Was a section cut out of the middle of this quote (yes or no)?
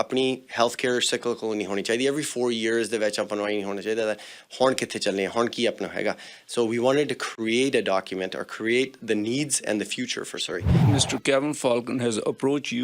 yes